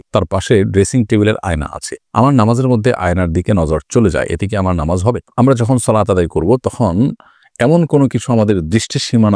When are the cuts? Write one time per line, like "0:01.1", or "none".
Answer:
none